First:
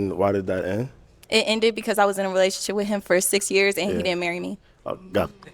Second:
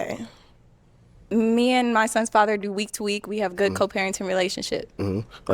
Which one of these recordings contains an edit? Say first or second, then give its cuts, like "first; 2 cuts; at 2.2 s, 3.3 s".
second; 1 cut; at 1.2 s